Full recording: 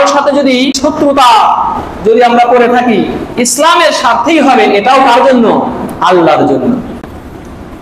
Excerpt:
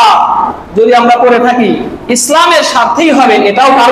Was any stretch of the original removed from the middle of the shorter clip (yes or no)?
no